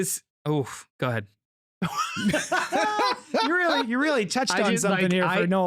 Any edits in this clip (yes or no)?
no